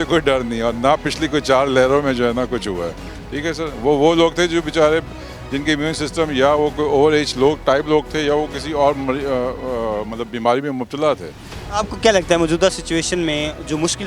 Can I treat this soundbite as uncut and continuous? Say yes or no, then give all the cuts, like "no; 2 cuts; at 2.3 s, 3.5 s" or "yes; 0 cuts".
yes; 0 cuts